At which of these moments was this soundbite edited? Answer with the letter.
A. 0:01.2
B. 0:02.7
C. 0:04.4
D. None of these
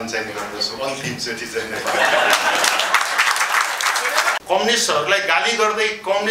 C